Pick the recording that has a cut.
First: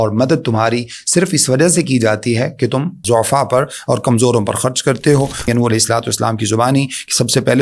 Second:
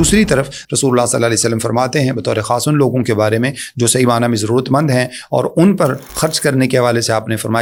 first; 2 cuts; at 3.0 s, 5.5 s

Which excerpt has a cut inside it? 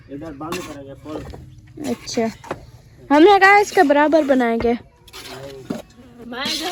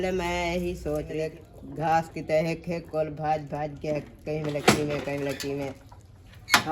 second; 1 cut; at 1.2 s

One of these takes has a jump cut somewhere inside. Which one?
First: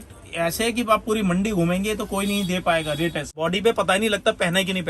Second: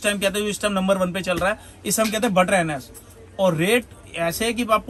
first; 1 cut; at 3.4 s

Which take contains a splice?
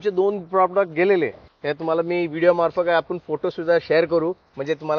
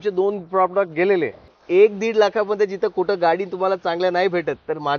second; 1 cut; at 1.6 s

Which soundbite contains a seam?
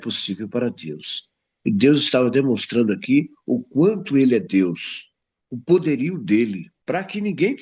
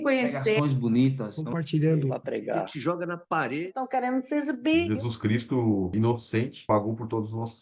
first; 1 cut; at 6.7 s

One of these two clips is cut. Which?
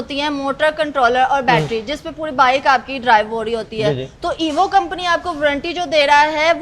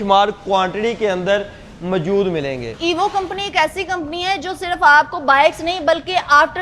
second; 1 cut; at 2.7 s

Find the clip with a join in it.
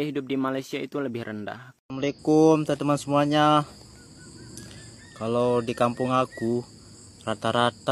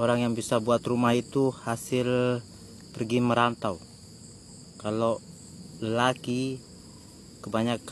first; 1 cut; at 1.6 s

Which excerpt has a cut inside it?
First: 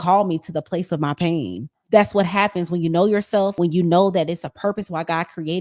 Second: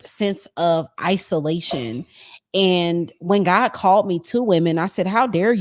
first; 2 cuts; at 1.8 s, 3.5 s

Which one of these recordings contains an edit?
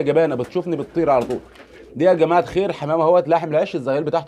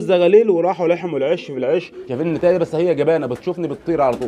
second; 1 cut; at 2.0 s

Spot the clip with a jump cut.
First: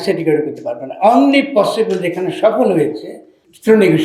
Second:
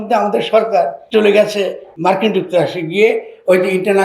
second; 2 cuts; at 1.0 s, 1.9 s

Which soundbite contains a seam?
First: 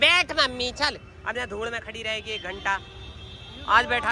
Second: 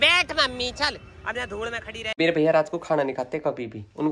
second; 1 cut; at 2.1 s

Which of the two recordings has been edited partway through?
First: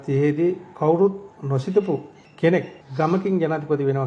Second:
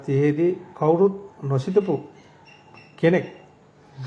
first; 2 cuts; at 2.2 s, 2.8 s

